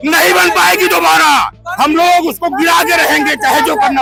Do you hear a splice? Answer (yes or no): no